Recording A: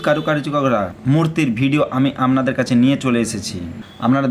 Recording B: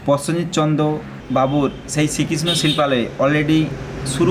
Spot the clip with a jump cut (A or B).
B